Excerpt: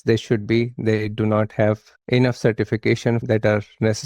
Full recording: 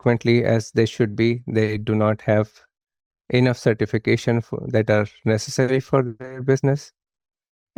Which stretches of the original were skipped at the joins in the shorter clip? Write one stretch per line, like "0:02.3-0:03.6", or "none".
0:02.6-0:03.1
0:04.4-0:04.7